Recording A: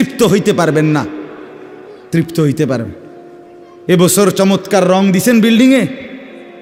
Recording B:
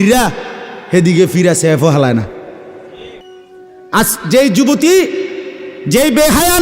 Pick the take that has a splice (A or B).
B